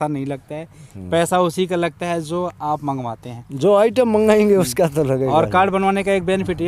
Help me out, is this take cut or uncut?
uncut